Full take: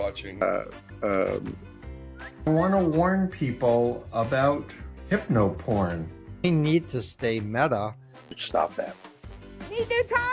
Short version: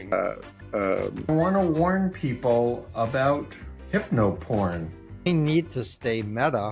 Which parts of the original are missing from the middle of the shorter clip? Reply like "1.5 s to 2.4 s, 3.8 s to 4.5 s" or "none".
1.5 s to 2.4 s